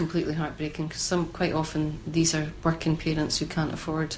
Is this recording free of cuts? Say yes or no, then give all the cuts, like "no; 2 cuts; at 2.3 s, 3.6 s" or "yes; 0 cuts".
yes; 0 cuts